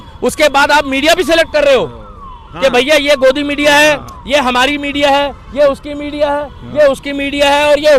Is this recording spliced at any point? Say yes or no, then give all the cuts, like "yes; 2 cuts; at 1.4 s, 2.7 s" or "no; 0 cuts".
no; 0 cuts